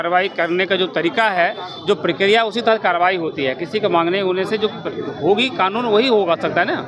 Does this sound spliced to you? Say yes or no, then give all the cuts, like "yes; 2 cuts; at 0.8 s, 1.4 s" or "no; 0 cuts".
no; 0 cuts